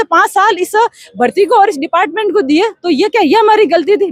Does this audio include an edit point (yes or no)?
no